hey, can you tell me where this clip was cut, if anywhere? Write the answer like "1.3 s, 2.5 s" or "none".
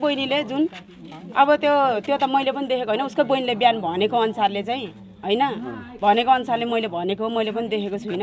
none